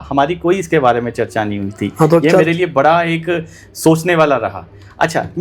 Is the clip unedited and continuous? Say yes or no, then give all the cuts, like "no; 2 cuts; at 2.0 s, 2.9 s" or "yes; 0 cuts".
yes; 0 cuts